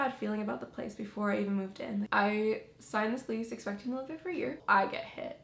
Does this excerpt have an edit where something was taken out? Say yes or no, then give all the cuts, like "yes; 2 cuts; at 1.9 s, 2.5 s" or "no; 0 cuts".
yes; 2 cuts; at 2.1 s, 4.6 s